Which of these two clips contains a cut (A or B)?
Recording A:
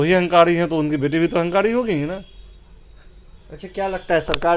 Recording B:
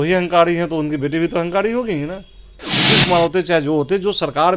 B